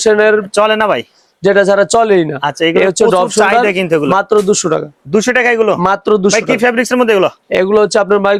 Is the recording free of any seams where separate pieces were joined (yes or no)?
yes